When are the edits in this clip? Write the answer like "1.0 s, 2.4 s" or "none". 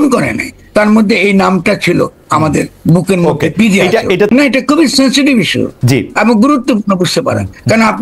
4.3 s